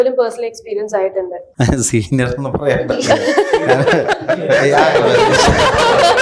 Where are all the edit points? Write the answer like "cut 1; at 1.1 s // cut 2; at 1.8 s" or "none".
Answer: cut 1; at 1.4 s